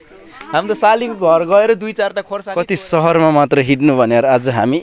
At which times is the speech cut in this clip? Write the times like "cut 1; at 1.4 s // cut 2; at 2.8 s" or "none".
cut 1; at 2.3 s